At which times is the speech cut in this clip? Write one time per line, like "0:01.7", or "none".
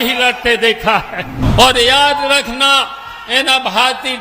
0:01.4